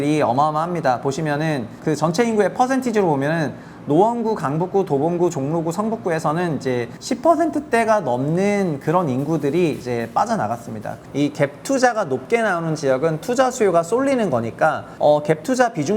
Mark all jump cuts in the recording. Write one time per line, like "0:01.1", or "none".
0:01.8
0:06.9
0:11.0
0:14.9